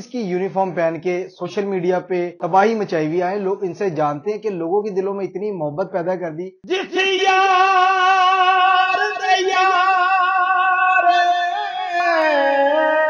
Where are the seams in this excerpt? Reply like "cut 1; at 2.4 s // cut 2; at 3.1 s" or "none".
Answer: cut 1; at 2.4 s // cut 2; at 6.6 s